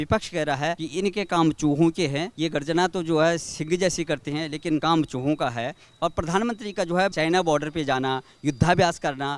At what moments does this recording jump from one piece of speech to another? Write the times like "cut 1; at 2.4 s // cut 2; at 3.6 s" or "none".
cut 1; at 0.8 s // cut 2; at 2.3 s // cut 3; at 4.8 s // cut 4; at 7.1 s

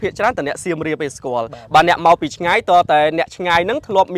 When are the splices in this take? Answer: none

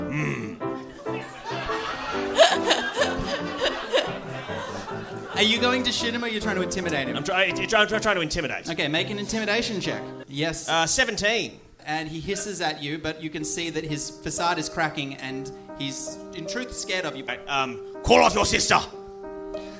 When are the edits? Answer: cut 1; at 10.2 s // cut 2; at 11.8 s // cut 3; at 17.3 s

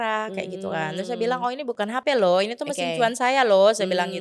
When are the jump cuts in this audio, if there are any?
cut 1; at 1.9 s

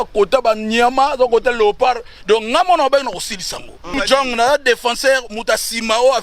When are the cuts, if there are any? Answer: cut 1; at 3.9 s

